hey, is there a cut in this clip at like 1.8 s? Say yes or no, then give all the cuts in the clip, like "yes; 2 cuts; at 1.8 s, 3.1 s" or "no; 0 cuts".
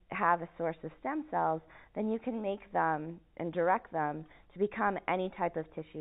no; 0 cuts